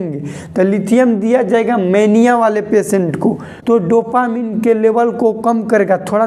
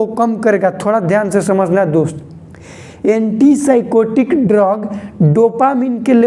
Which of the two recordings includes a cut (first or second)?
first